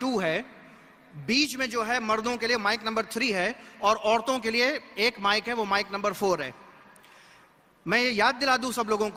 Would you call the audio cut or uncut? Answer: uncut